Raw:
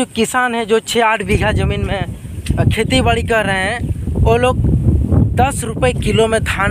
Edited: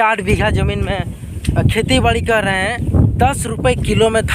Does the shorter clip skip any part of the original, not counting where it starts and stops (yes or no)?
yes